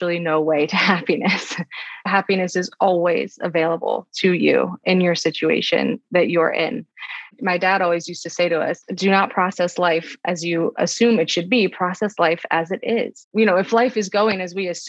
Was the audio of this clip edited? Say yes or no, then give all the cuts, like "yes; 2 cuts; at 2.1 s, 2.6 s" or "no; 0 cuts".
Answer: yes; 3 cuts; at 2.0 s, 10.8 s, 13.2 s